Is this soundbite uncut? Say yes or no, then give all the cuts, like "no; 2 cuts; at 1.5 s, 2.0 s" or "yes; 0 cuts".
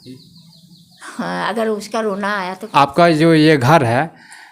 no; 1 cut; at 2.7 s